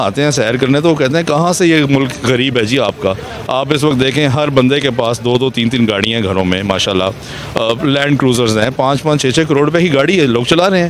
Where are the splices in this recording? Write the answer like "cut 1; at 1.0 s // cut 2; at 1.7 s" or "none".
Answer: none